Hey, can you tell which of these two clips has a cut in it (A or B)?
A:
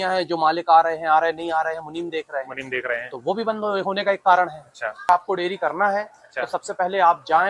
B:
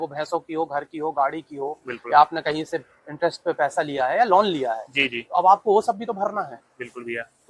A